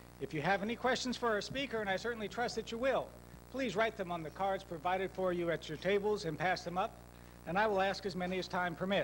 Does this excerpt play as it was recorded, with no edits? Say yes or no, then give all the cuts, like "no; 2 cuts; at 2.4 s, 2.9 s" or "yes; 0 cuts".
yes; 0 cuts